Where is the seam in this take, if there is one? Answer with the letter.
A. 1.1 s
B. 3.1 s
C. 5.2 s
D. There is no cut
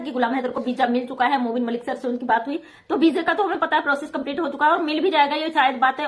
D